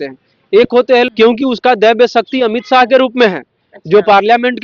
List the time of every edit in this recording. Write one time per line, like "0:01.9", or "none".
0:01.1